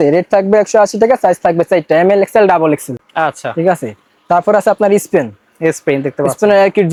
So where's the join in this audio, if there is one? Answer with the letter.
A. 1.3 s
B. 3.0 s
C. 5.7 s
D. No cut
D